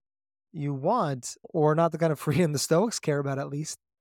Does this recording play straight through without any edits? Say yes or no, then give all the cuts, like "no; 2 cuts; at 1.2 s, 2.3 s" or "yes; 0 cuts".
no; 1 cut; at 1.4 s